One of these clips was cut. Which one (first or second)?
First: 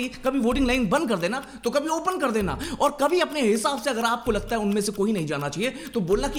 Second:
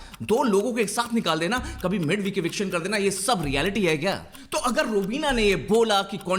second